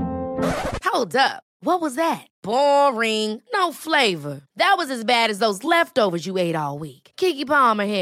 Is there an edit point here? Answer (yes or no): no